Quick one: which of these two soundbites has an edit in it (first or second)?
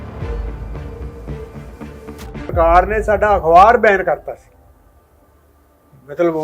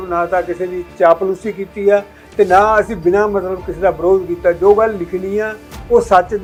first